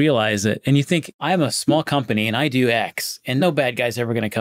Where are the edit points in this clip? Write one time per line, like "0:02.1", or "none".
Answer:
0:01.1
0:03.4